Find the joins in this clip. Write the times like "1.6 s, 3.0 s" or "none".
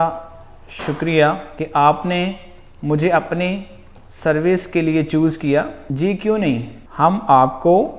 1.5 s, 5.8 s, 6.8 s